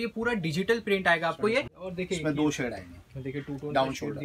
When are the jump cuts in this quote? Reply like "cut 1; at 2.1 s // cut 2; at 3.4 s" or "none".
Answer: cut 1; at 1.8 s